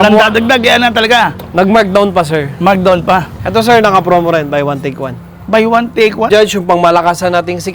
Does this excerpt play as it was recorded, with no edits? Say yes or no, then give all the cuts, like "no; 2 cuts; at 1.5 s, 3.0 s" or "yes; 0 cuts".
no; 2 cuts; at 3.3 s, 6.3 s